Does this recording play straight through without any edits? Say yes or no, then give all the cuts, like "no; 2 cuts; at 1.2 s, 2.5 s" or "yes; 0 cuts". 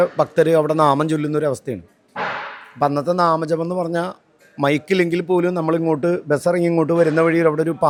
yes; 0 cuts